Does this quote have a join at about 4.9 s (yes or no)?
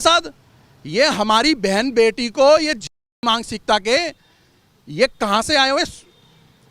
no